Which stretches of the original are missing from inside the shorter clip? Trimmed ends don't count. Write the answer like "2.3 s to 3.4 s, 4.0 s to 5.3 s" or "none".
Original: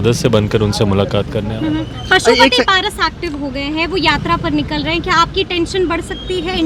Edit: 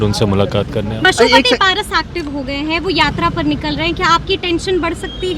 1.5 s to 2.0 s

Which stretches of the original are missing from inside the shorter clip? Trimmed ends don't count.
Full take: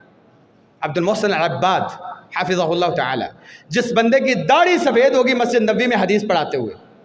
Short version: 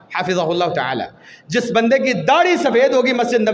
none

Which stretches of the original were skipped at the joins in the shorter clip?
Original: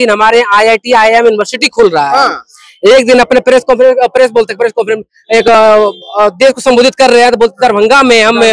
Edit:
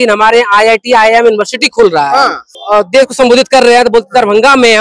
2.6 s to 6.0 s

